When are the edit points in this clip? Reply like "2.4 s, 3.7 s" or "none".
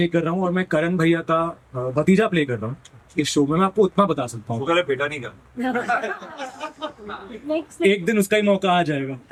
none